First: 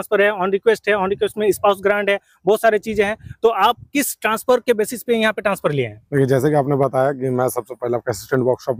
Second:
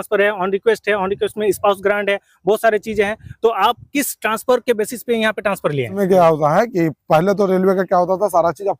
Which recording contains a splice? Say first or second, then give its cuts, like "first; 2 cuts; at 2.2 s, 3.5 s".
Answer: second; 1 cut; at 6.0 s